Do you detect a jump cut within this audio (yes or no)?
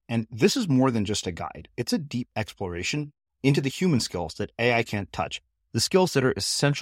no